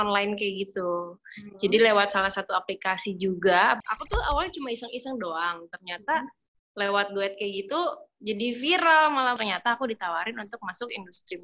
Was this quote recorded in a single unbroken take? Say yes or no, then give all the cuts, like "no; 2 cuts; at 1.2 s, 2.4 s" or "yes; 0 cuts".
no; 2 cuts; at 3.8 s, 9.4 s